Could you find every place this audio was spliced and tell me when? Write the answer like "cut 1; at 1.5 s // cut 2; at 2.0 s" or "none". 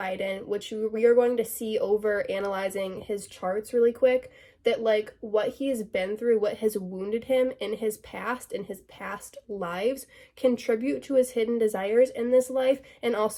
none